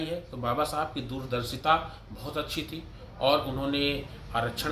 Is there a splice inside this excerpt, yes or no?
no